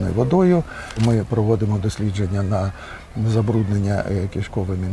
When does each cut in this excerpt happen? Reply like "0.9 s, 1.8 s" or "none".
1.0 s